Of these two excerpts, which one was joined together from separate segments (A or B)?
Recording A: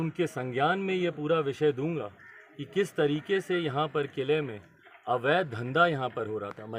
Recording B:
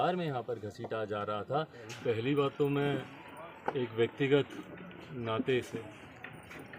B